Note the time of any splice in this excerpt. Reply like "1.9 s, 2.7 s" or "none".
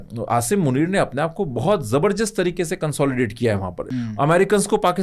3.8 s